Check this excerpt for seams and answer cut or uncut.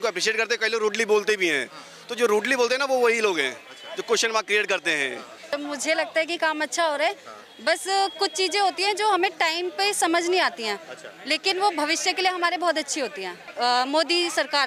cut